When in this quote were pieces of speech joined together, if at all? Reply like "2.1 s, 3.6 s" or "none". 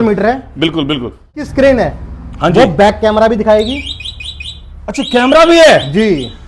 1.5 s